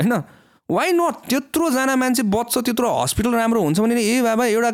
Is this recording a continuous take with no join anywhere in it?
yes; 0 cuts

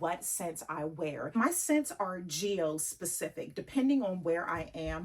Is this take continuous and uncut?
no; 1 cut; at 1.3 s

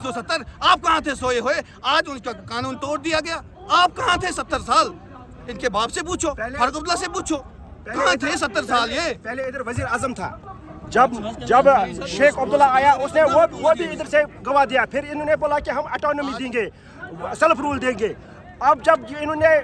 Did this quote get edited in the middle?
no; 0 cuts

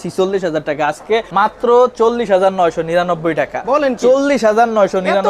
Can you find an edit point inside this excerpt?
yes; 1 cut; at 1.3 s

